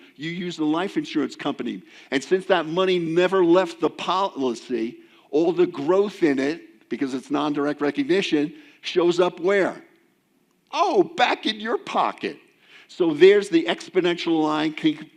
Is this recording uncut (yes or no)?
yes